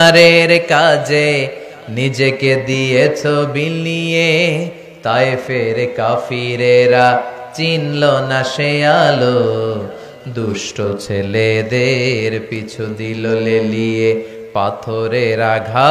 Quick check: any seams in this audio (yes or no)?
no